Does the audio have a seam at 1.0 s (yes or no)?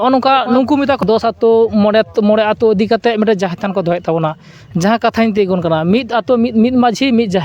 yes